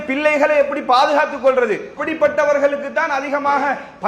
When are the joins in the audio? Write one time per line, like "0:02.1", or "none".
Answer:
0:02.0